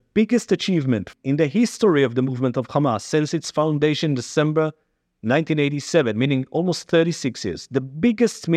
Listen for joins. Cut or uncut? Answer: cut